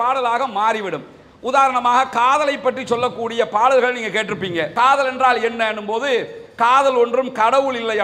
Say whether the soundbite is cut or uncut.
uncut